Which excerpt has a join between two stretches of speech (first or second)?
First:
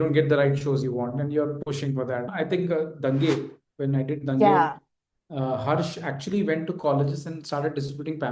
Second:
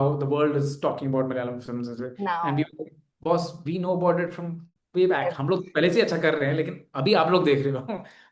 first